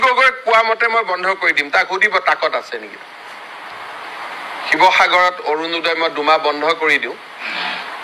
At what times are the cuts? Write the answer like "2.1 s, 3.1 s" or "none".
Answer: none